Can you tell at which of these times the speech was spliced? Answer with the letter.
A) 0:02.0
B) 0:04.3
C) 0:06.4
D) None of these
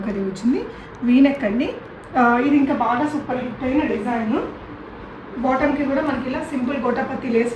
D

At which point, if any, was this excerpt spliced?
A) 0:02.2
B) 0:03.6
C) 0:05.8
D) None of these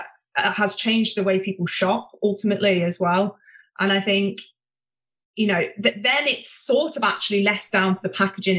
D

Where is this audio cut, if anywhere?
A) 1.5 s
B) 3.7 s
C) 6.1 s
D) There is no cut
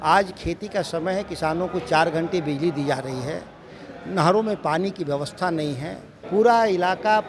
C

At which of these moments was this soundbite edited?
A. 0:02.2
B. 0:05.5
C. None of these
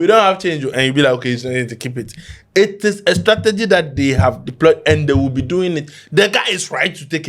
C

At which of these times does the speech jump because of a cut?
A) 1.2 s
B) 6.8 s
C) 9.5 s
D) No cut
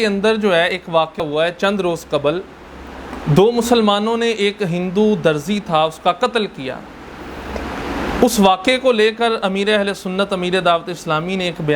A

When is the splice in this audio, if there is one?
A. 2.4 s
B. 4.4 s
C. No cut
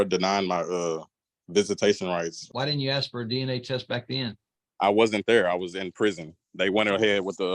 A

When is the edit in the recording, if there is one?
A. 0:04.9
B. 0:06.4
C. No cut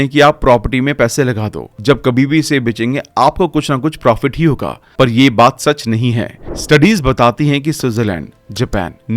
B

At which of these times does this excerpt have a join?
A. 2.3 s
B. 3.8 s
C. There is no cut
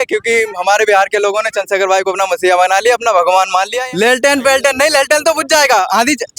B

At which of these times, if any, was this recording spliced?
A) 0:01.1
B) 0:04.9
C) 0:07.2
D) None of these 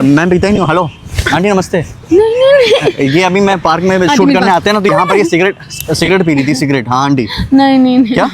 B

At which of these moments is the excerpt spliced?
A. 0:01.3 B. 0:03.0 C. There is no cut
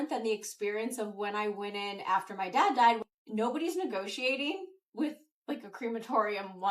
B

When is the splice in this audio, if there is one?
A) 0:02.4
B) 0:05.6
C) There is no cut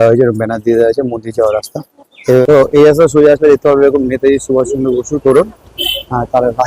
A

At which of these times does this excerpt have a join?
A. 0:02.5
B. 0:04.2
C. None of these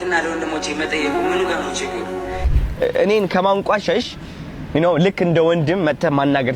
A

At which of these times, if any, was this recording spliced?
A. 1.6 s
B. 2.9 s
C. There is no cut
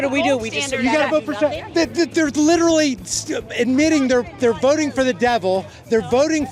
A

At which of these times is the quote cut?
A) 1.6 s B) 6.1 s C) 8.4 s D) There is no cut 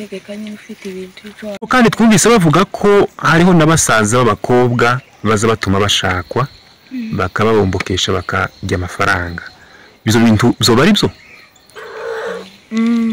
A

